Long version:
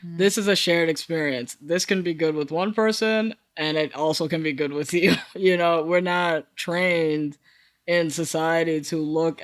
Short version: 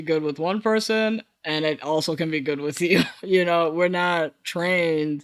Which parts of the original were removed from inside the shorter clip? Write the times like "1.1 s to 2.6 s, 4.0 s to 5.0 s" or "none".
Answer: none